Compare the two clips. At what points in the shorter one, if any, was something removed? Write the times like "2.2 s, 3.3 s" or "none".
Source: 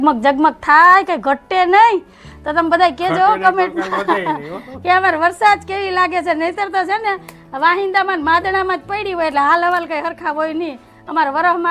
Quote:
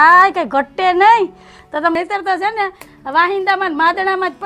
2.0 s

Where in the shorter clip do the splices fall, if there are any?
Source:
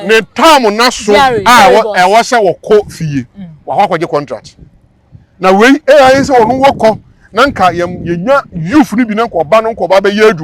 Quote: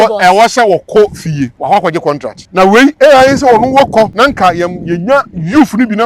1.6 s, 2.4 s, 4.1 s

